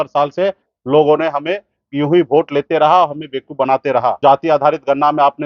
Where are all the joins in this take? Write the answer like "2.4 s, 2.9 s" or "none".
4.2 s

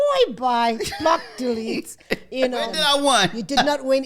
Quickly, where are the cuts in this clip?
2.7 s

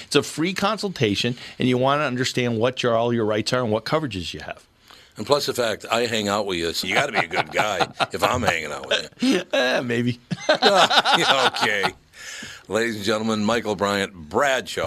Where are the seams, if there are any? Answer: none

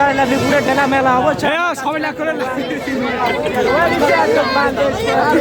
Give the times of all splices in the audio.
none

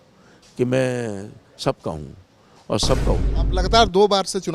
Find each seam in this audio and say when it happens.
3.3 s

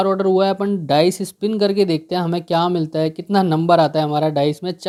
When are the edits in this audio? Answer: none

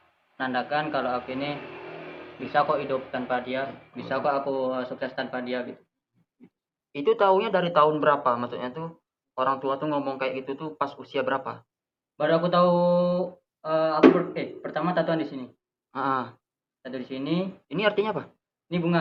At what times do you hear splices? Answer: none

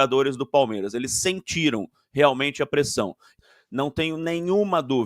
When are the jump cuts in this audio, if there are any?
3.3 s

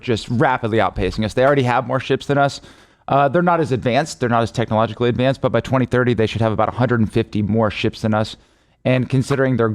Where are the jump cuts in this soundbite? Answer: none

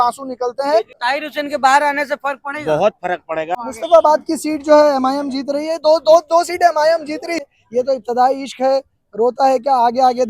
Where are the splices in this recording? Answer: 0.9 s, 3.6 s, 7.5 s

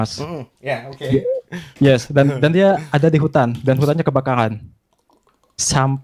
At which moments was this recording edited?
none

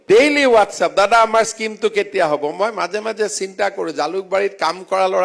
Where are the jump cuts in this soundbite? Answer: none

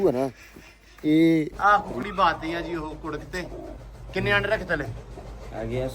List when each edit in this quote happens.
1.5 s

